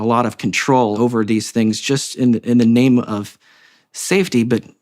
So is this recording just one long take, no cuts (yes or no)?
no